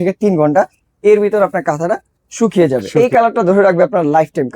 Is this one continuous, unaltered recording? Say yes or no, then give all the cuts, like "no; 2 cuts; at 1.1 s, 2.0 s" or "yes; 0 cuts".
no; 1 cut; at 2.9 s